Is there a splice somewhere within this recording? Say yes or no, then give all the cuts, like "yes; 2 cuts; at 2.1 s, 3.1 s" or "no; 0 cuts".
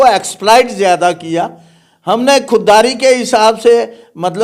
no; 0 cuts